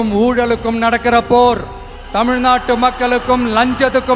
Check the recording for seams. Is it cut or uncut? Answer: uncut